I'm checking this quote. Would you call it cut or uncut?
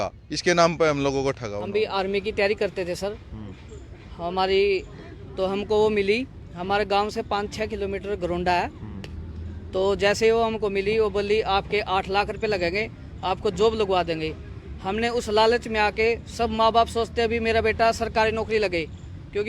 cut